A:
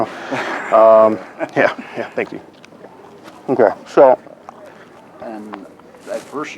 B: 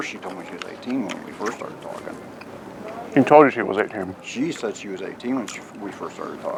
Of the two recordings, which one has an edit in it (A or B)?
A